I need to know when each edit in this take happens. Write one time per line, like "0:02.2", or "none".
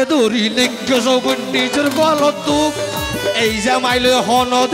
none